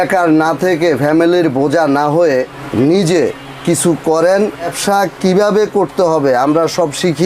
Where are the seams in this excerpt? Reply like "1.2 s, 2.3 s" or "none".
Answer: 2.6 s, 4.7 s

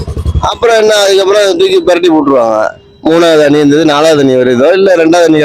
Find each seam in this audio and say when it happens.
none

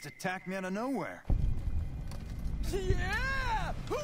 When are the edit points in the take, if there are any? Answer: 1.2 s

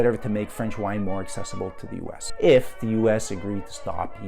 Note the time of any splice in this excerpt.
2.2 s

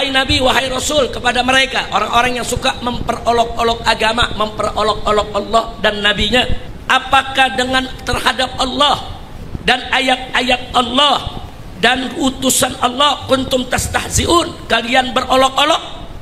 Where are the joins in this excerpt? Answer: 6.7 s

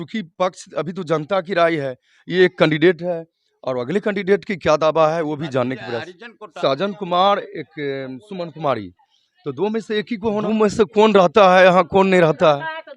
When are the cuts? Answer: 6.5 s, 10.4 s

